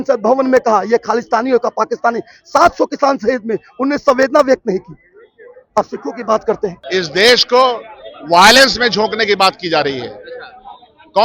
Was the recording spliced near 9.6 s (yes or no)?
no